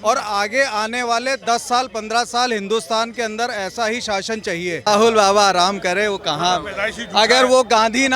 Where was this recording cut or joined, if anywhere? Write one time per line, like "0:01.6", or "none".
0:04.9